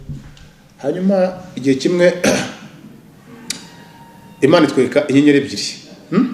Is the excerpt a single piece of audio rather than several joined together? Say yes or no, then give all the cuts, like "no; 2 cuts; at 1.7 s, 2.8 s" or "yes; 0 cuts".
yes; 0 cuts